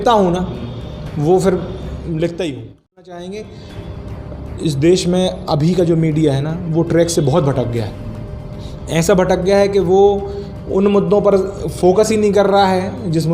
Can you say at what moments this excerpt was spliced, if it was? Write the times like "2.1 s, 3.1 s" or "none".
3.2 s